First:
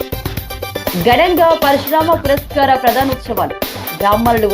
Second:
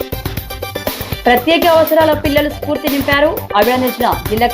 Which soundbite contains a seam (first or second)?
second